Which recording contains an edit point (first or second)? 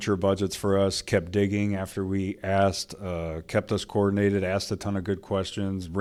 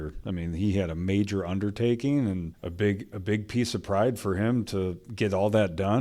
second